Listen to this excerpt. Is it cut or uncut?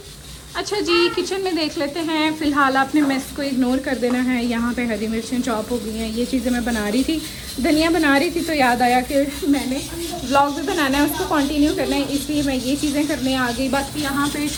uncut